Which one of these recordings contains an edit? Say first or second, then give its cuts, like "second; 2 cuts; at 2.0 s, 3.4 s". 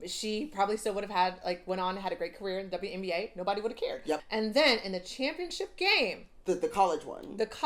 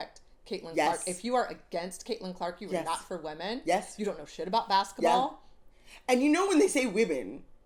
first; 1 cut; at 4.2 s